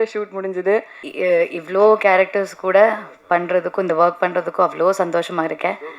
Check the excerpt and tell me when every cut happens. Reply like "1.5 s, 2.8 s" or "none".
1.0 s

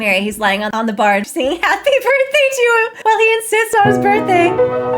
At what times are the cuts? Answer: 1.3 s

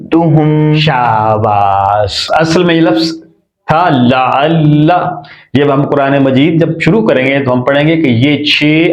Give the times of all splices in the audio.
2.2 s

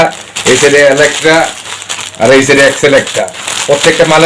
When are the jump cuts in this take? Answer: none

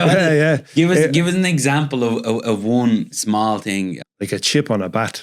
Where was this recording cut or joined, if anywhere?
4.0 s

